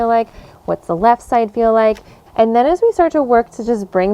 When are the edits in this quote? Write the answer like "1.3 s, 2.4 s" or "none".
2.2 s